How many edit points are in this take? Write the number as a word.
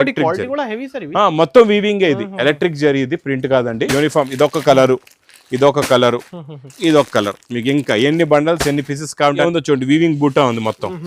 two